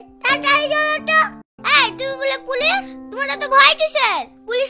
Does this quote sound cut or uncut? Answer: cut